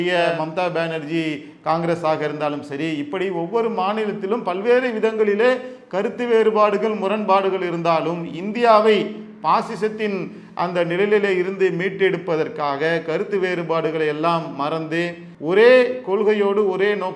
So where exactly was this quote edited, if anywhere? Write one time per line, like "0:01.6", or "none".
0:15.3